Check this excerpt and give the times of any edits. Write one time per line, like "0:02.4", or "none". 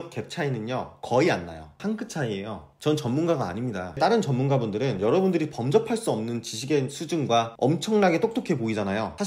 0:01.8
0:04.0